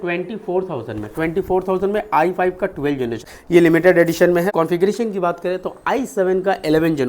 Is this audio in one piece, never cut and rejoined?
no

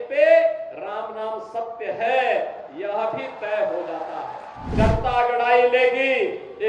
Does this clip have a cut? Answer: yes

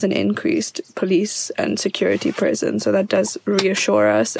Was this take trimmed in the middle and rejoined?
no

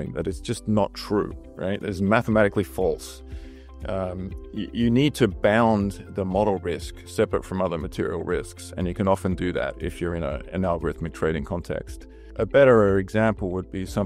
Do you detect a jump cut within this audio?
no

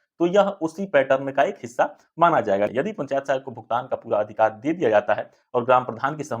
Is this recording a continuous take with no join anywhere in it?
no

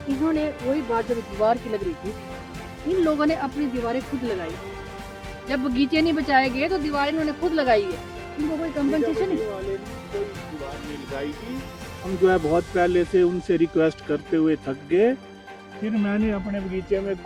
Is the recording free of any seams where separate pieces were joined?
yes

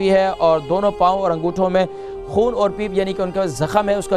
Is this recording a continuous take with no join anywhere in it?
yes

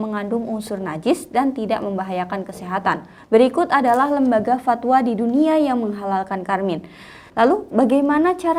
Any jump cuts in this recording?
yes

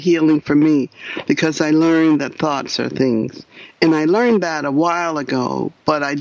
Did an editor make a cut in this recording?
no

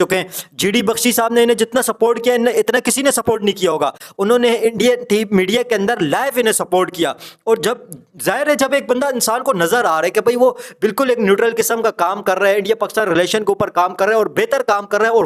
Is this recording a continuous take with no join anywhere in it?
yes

